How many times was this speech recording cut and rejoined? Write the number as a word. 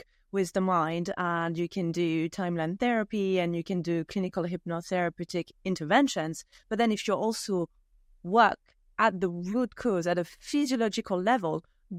zero